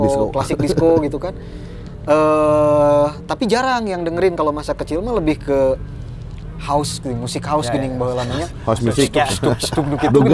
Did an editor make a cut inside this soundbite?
no; 0 cuts

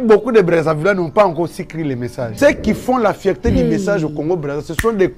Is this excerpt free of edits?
yes; 0 cuts

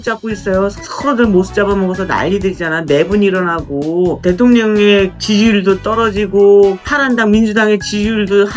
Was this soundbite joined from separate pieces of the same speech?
yes; 4 cuts; at 0.9 s, 4.2 s, 5.2 s, 6.9 s

